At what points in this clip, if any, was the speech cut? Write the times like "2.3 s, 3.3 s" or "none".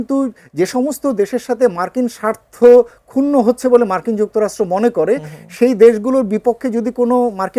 none